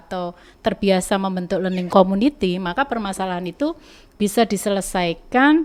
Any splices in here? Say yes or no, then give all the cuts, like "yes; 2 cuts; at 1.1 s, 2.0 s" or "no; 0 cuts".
no; 0 cuts